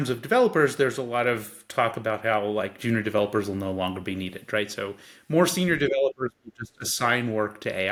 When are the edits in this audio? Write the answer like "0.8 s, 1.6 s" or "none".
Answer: none

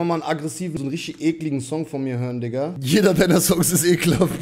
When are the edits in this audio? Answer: 0.7 s, 2.8 s

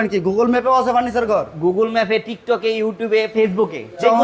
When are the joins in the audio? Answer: none

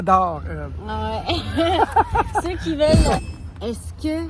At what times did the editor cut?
3.2 s

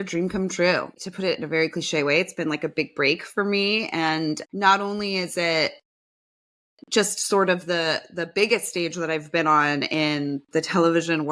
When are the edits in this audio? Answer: 0.9 s

